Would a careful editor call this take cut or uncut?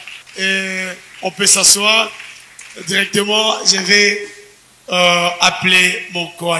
uncut